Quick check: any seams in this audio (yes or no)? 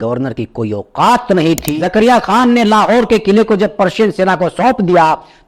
yes